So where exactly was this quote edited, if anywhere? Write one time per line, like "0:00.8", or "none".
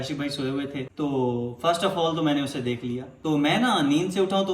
0:00.9
0:03.0